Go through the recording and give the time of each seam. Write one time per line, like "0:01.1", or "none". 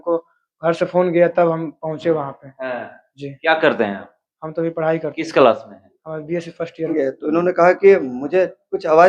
0:06.9